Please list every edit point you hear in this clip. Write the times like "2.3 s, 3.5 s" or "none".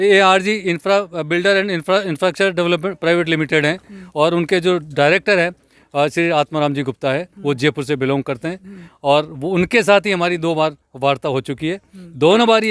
none

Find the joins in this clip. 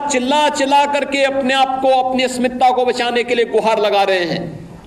none

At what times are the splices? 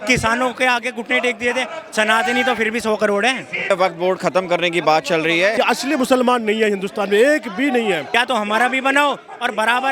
3.7 s, 5.5 s, 8.0 s

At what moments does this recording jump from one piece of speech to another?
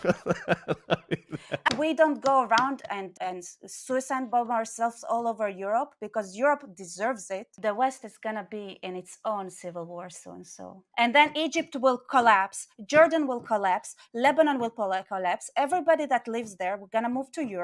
1.7 s, 7.5 s, 10.8 s

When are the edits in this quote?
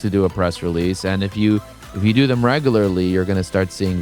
none

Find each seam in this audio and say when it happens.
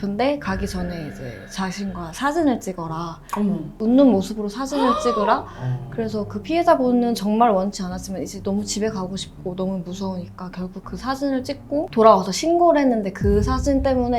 none

